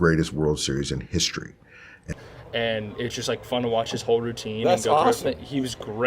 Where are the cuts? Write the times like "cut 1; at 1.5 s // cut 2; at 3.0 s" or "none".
cut 1; at 2.1 s